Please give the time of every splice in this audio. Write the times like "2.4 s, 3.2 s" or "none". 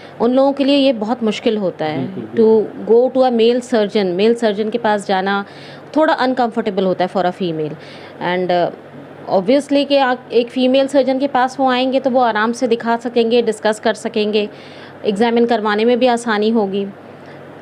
none